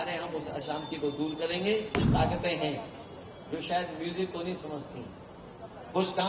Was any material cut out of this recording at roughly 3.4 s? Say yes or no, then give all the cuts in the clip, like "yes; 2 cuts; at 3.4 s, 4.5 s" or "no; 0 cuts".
no; 1 cut; at 2.0 s